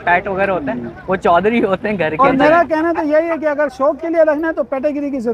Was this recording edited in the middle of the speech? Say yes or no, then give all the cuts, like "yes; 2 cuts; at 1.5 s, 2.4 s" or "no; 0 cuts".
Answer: yes; 1 cut; at 2.2 s